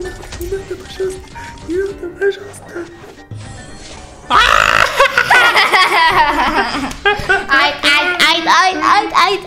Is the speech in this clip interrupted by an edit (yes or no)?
no